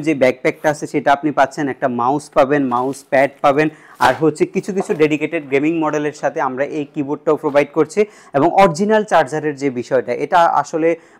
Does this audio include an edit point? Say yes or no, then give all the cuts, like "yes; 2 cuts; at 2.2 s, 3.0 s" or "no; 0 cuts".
no; 0 cuts